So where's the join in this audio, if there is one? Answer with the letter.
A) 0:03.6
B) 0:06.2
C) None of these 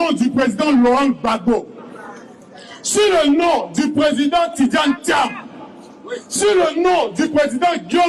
C